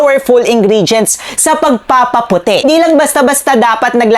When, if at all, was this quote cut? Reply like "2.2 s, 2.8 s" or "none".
2.6 s

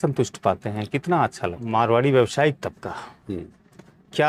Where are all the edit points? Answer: 1.6 s

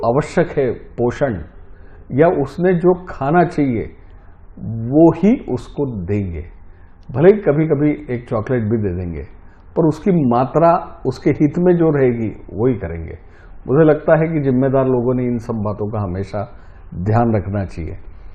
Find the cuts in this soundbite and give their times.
none

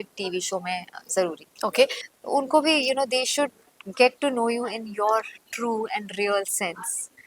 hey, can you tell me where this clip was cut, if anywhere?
2.0 s

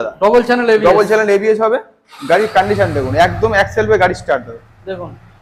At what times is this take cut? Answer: none

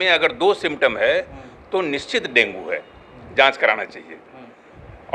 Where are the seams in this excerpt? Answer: none

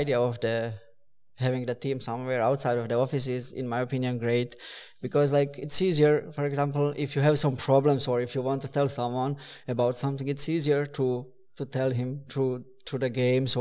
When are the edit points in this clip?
none

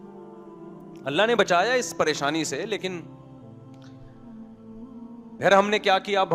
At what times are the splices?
none

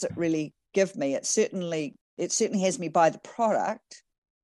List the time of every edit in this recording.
2.0 s

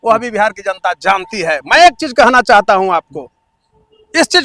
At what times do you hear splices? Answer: none

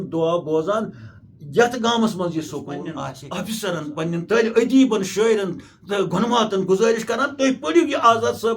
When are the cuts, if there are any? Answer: 3.2 s

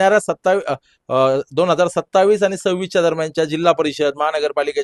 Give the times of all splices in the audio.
none

